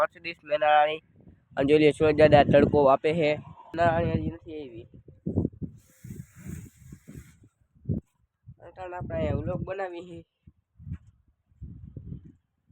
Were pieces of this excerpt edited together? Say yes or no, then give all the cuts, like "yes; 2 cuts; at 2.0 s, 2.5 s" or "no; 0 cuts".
yes; 1 cut; at 3.7 s